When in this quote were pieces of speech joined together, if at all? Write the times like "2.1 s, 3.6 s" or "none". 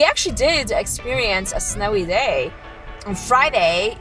2.9 s